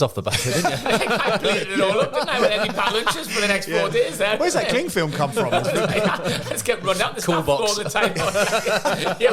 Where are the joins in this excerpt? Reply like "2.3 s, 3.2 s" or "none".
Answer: none

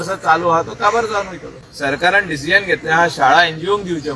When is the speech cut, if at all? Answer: 1.4 s

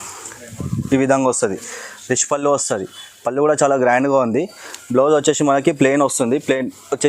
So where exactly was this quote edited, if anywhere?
none

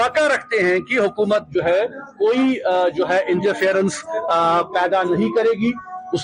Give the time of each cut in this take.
none

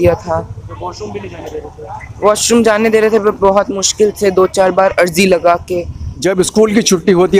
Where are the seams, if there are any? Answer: 6.0 s

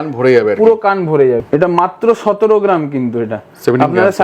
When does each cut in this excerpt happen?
1.4 s

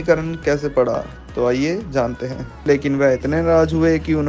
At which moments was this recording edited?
2.6 s

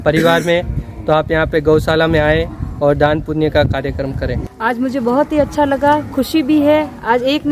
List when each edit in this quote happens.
4.5 s

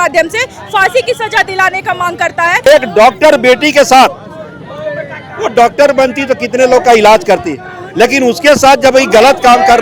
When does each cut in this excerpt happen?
2.7 s

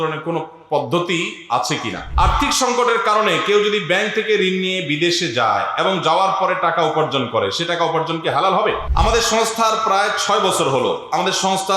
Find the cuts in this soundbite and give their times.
2.0 s, 8.8 s

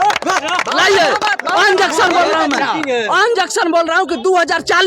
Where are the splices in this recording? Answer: none

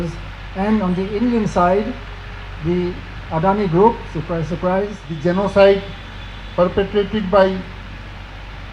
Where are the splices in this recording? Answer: 5.0 s

